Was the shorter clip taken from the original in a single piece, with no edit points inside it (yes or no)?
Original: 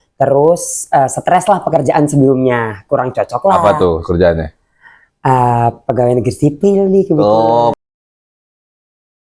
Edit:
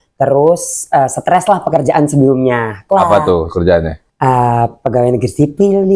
no